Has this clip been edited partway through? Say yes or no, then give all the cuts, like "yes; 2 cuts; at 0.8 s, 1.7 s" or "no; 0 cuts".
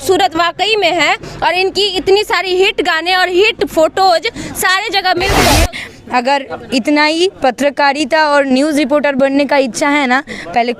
yes; 1 cut; at 5.5 s